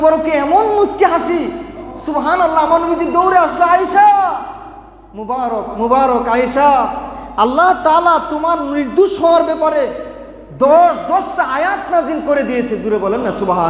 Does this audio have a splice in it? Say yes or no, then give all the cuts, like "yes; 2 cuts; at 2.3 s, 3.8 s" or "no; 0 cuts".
no; 0 cuts